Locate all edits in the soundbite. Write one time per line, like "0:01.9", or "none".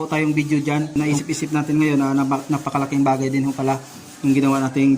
0:00.9